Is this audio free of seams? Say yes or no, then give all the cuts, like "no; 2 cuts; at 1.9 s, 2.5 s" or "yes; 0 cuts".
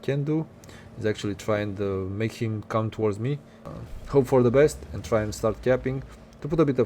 no; 1 cut; at 3.6 s